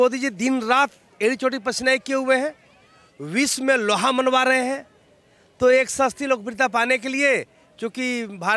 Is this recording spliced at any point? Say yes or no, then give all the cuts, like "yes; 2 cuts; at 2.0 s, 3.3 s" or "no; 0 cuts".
no; 0 cuts